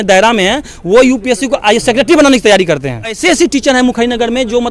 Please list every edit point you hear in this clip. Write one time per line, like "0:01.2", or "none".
0:03.2